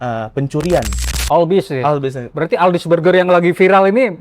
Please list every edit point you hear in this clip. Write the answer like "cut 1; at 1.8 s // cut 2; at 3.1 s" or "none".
cut 1; at 1.0 s